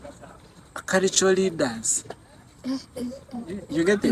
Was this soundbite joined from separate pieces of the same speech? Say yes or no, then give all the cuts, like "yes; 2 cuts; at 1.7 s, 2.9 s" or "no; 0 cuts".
no; 0 cuts